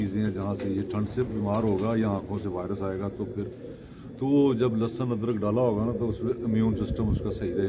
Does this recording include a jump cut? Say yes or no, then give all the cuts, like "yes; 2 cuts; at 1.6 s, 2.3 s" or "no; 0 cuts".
no; 0 cuts